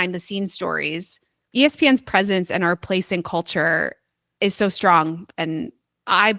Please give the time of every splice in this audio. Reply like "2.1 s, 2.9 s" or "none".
1.4 s